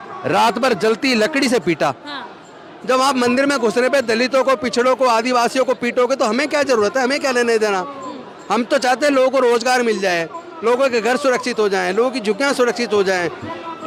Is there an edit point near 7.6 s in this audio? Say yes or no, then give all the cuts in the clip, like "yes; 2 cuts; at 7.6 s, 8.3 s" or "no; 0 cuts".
no; 0 cuts